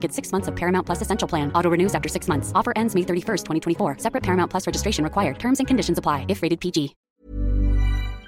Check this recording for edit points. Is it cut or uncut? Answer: cut